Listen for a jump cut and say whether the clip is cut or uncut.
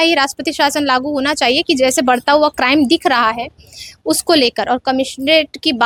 uncut